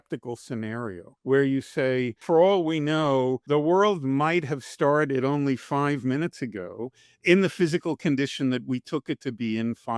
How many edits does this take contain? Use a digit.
3